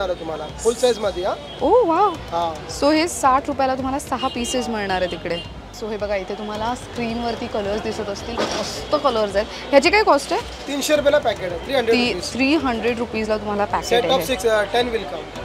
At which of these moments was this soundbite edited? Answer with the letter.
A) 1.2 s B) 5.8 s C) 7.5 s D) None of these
B